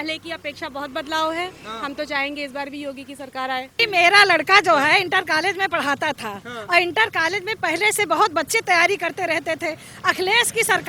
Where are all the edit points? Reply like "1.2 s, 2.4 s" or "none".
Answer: 3.8 s